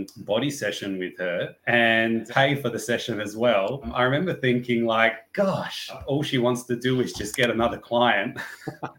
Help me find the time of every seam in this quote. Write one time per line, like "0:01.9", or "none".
0:02.2
0:03.9
0:06.0